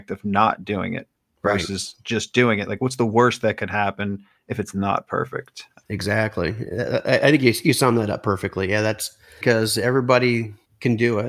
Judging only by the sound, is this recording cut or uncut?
cut